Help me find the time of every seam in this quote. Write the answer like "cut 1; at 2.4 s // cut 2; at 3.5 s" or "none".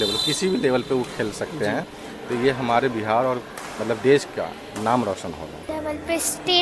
cut 1; at 5.7 s